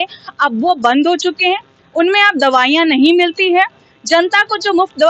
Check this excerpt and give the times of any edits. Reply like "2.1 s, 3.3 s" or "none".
none